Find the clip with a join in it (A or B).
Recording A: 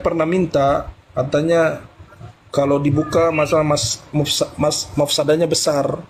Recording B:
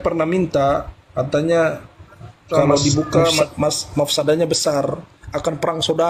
B